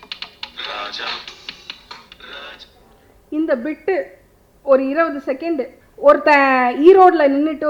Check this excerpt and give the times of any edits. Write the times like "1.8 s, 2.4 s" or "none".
5.8 s